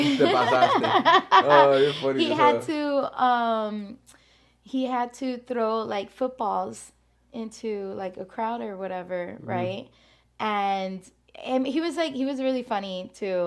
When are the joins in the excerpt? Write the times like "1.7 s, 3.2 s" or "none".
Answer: none